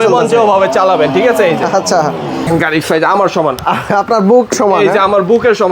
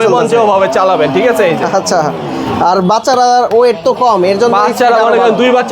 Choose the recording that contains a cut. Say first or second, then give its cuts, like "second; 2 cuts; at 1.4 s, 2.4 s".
first; 1 cut; at 2.4 s